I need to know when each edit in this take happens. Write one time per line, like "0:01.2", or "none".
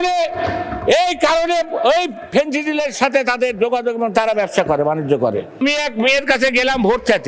0:05.6